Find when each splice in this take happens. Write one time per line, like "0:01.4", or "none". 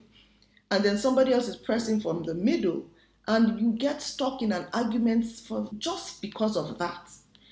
0:05.7